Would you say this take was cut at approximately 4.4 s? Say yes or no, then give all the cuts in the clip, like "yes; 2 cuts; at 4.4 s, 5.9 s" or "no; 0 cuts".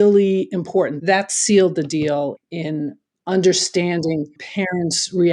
yes; 3 cuts; at 0.9 s, 2.4 s, 4.4 s